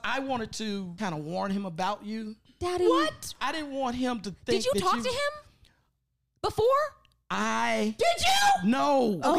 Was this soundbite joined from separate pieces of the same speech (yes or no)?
yes